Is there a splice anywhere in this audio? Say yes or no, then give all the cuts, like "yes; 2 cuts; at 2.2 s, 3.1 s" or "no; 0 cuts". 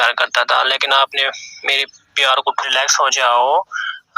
yes; 1 cut; at 2.6 s